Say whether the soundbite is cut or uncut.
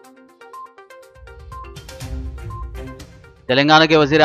cut